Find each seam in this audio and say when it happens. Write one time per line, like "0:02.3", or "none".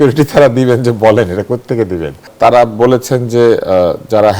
0:02.3